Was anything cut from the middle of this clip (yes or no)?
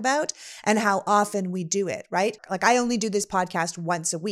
yes